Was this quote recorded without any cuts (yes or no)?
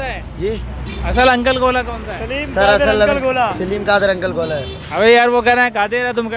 yes